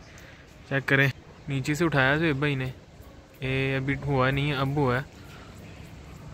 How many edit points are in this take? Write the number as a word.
one